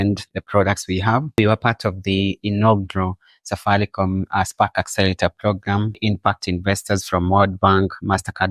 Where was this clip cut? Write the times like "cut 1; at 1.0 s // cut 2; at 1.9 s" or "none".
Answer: cut 1; at 1.4 s // cut 2; at 6.0 s